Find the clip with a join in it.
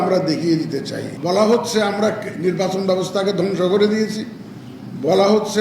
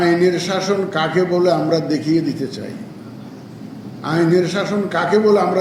first; 1 cut; at 1.1 s

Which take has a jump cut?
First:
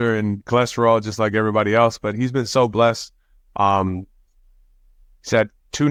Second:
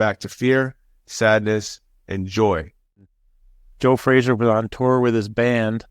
second; 1 cut; at 3.1 s

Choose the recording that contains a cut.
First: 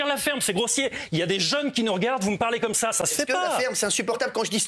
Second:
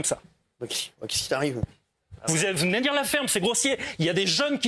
second; 1 cut; at 1.9 s

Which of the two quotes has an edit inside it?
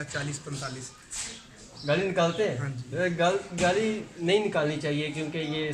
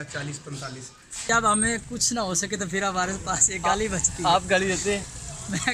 second; 1 cut; at 1.3 s

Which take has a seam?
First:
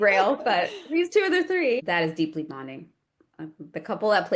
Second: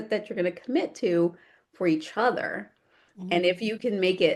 first; 1 cut; at 1.8 s

